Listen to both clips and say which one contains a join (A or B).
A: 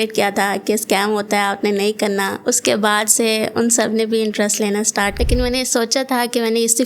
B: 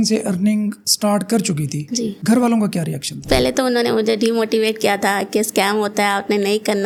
A